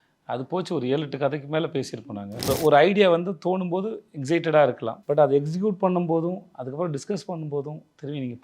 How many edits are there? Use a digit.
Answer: 2